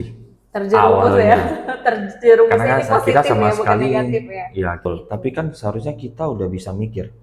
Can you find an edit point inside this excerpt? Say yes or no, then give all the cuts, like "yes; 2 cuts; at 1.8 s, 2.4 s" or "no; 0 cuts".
yes; 1 cut; at 4.9 s